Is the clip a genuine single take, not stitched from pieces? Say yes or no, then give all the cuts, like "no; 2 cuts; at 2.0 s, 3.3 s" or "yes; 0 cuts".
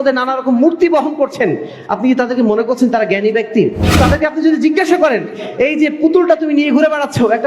no; 1 cut; at 3.9 s